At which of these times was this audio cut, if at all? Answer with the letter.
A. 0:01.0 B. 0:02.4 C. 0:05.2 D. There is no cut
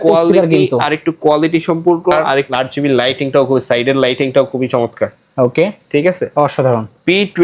B